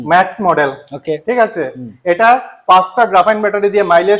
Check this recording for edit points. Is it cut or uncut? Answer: uncut